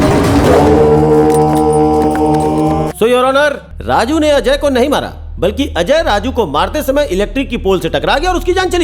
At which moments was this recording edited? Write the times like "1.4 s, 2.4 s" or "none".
2.9 s, 3.7 s